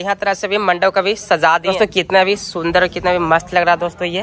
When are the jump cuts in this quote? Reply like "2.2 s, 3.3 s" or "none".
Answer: 1.7 s

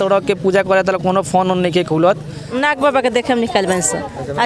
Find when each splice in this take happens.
2.5 s

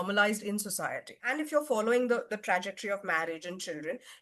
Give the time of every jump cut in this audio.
1.3 s

